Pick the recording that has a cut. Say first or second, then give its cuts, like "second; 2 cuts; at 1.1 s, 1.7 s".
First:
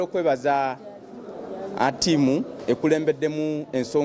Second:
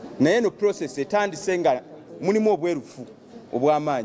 second; 1 cut; at 1.8 s